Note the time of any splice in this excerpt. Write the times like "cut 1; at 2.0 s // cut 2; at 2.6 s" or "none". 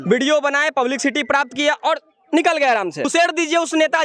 cut 1; at 3.1 s